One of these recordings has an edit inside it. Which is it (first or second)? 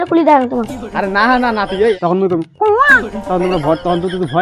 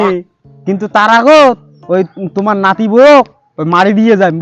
first